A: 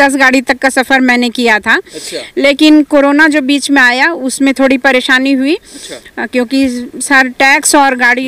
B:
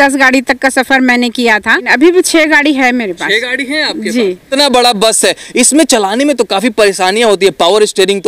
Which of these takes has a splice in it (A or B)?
B